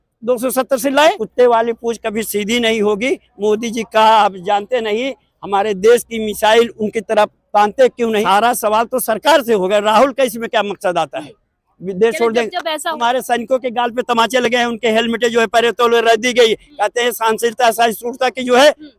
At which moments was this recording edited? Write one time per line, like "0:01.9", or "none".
0:00.9
0:08.2
0:12.9

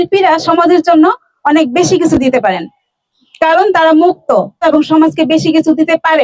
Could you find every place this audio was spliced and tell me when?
0:04.6

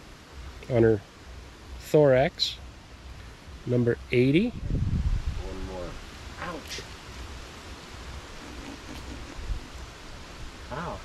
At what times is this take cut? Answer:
0:04.8

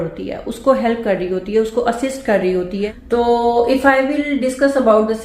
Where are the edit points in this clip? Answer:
0:02.9

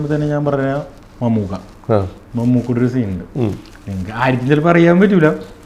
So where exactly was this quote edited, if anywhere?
none

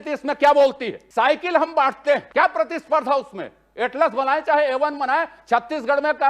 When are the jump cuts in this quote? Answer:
0:00.9
0:02.3

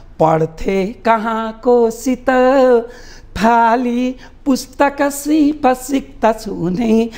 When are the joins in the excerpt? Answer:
none

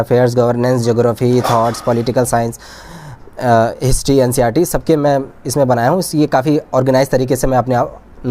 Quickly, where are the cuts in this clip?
none

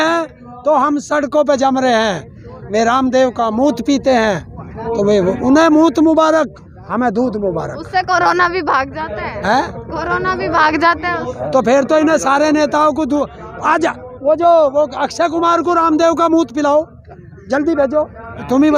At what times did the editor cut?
none

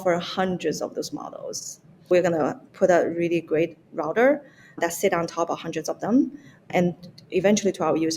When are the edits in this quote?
0:02.1
0:04.8
0:06.7

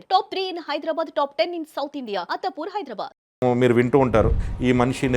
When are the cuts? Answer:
0:03.4

